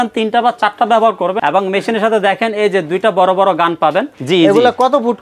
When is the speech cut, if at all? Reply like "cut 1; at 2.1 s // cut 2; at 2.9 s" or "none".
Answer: cut 1; at 1.4 s // cut 2; at 4.2 s